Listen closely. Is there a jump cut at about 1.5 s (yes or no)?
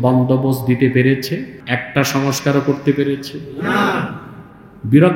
yes